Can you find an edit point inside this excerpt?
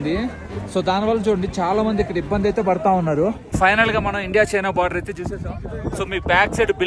yes; 1 cut; at 3.4 s

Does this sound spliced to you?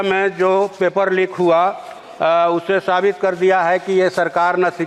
no; 0 cuts

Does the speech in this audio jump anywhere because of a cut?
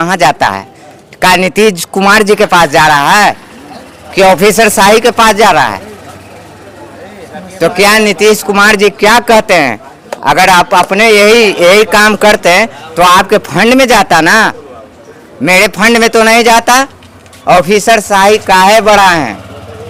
no; 0 cuts

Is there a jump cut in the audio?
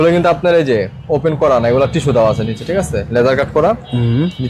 no; 0 cuts

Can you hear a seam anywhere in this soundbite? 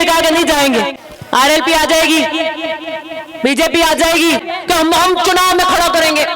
yes; 2 cuts; at 1.0 s, 4.4 s

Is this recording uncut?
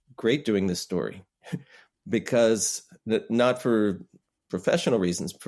yes; 0 cuts

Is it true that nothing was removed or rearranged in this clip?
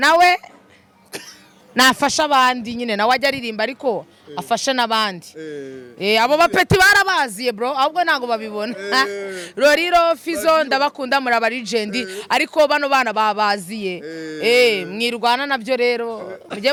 yes; 0 cuts

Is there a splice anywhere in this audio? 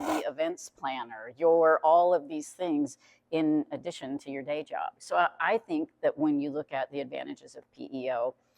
yes; 1 cut; at 5.0 s

